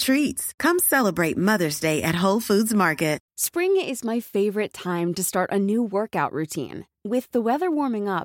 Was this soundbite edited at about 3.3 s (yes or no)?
yes